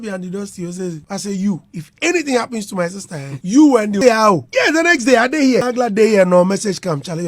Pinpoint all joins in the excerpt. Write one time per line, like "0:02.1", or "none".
0:04.0
0:05.6